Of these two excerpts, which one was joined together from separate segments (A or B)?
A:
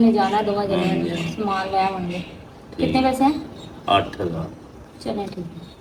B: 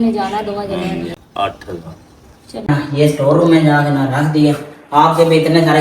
B